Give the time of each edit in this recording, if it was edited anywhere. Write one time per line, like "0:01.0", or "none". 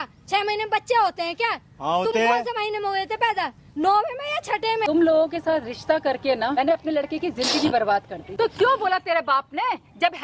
0:04.9
0:06.5
0:08.2